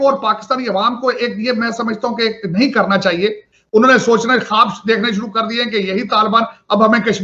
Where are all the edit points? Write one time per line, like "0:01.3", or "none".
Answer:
0:03.5